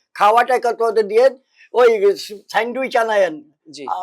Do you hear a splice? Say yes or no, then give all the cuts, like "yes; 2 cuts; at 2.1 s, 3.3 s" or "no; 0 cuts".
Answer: no; 0 cuts